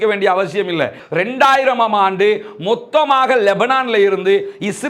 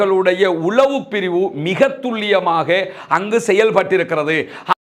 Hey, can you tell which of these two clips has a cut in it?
first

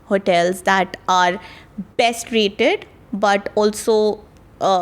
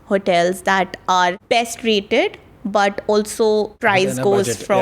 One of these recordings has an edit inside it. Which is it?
second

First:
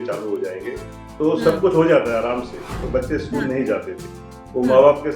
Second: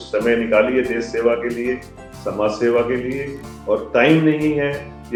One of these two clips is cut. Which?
first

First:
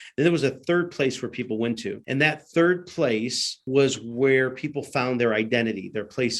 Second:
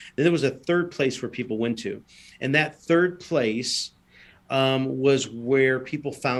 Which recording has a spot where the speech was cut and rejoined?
first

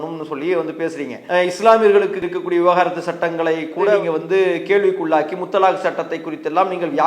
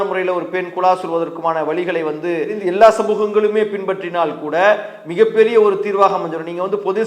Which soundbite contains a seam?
first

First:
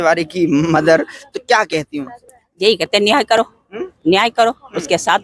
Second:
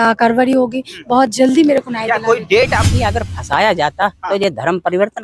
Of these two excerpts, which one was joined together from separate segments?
second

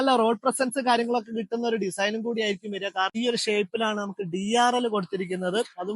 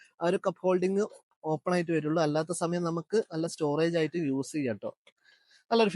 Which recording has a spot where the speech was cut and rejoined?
first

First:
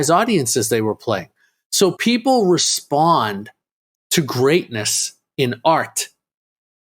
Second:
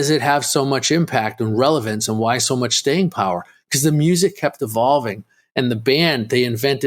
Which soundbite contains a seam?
first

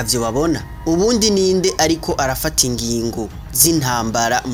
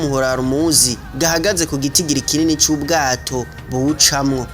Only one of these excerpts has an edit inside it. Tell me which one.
second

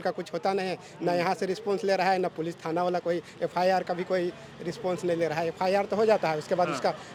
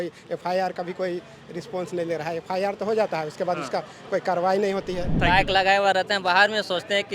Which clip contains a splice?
second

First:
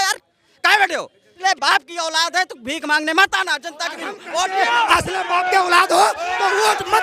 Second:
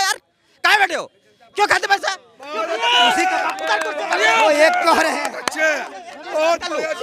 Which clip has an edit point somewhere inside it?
first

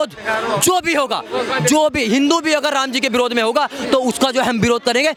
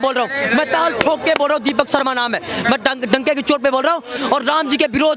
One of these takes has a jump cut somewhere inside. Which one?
second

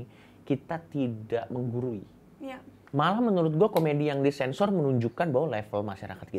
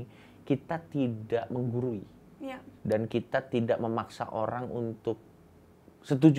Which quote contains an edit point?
first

